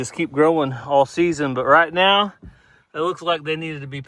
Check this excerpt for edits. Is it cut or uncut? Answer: uncut